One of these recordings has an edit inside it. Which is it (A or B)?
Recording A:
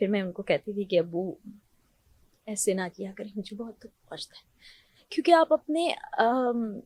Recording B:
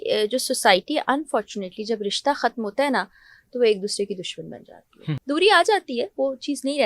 B